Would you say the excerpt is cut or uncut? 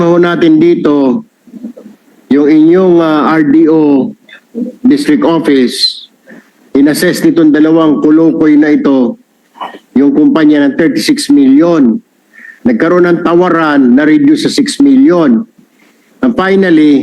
uncut